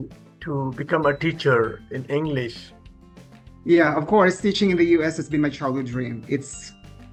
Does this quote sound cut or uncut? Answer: uncut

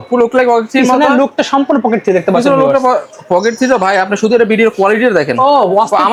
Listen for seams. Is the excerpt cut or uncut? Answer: uncut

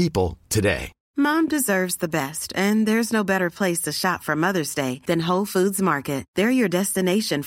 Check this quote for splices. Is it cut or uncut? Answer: cut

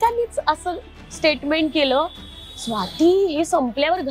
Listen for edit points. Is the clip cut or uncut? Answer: uncut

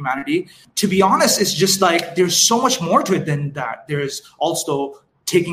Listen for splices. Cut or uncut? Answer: uncut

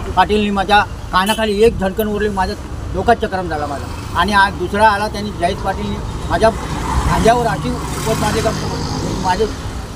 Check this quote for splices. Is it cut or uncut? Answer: uncut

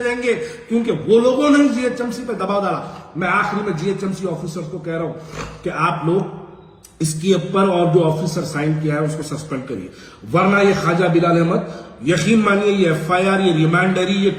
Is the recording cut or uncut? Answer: uncut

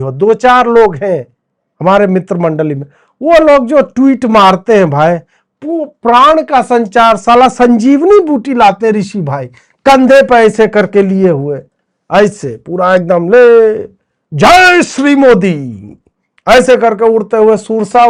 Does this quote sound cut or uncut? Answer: uncut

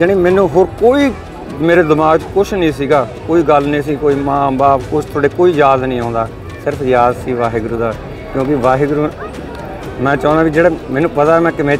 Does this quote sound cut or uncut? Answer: uncut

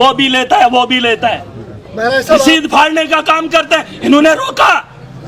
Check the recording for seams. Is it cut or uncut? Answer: uncut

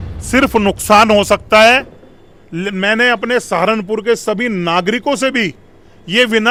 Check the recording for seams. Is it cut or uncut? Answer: uncut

